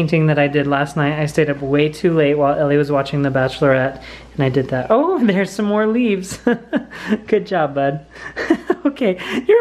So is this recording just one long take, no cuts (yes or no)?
yes